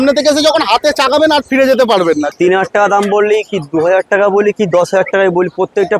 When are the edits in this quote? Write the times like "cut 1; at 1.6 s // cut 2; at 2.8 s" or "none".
cut 1; at 2.3 s